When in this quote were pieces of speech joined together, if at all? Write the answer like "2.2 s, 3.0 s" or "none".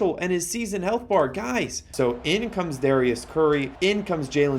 1.8 s, 3.7 s